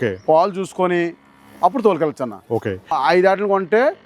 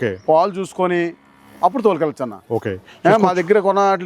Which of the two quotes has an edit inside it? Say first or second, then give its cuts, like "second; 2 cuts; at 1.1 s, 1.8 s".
first; 1 cut; at 2.9 s